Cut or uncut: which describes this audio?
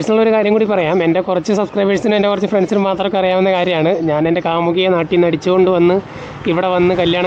uncut